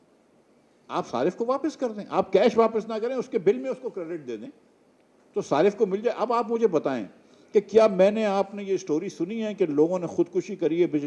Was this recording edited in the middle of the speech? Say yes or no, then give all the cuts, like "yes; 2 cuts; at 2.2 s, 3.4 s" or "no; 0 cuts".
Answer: no; 0 cuts